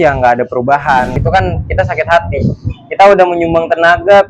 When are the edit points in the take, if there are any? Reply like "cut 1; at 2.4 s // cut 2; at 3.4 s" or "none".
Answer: cut 1; at 1.2 s